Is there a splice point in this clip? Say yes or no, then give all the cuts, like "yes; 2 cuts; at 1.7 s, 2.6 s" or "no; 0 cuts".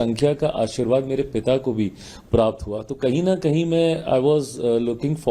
no; 0 cuts